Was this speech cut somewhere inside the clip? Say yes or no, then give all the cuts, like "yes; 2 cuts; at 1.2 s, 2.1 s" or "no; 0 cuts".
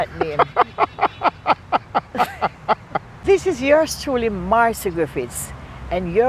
yes; 1 cut; at 3.1 s